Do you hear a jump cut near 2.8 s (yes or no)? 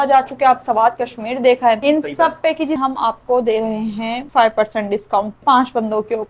yes